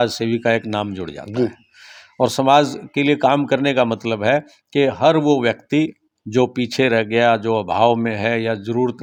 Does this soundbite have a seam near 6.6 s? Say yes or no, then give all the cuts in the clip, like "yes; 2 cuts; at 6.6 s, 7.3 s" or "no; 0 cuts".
no; 0 cuts